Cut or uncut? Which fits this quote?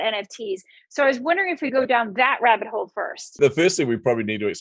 cut